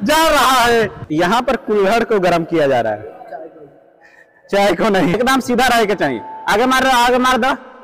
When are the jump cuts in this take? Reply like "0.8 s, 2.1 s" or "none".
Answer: 1.0 s, 5.2 s